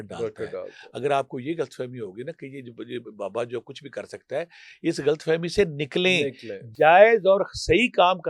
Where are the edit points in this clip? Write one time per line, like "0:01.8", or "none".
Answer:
none